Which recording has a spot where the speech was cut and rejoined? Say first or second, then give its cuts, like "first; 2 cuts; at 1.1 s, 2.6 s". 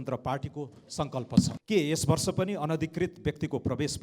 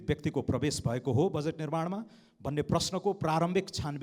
first; 1 cut; at 1.5 s